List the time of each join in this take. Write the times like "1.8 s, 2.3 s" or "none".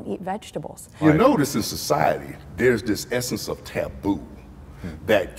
1.0 s